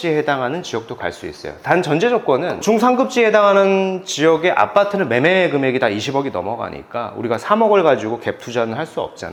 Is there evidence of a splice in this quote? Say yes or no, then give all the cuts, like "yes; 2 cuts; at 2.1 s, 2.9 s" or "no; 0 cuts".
no; 0 cuts